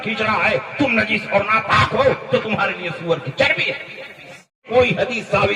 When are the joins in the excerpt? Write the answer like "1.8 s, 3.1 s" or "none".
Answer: 4.6 s